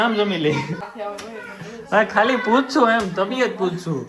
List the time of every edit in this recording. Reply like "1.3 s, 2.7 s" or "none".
0.9 s